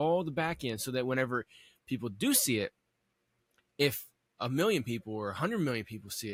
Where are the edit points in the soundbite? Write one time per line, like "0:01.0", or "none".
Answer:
none